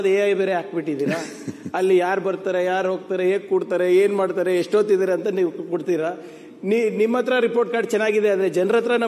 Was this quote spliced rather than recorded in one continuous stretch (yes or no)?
no